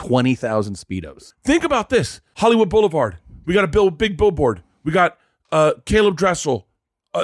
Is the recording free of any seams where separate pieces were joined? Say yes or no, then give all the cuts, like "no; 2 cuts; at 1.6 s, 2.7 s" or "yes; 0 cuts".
no; 2 cuts; at 1.2 s, 2.2 s